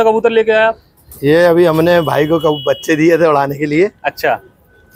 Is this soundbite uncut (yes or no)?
yes